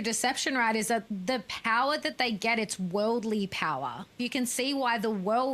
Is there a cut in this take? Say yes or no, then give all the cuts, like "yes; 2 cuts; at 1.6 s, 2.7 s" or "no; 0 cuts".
yes; 2 cuts; at 1.1 s, 4.2 s